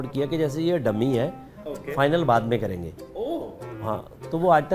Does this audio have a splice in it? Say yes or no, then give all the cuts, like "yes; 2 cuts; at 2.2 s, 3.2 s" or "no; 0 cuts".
no; 0 cuts